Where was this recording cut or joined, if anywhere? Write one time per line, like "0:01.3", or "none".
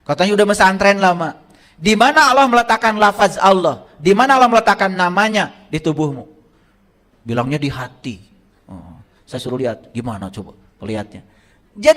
none